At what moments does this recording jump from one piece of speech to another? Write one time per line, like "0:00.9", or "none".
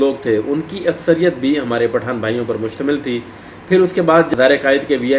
0:04.0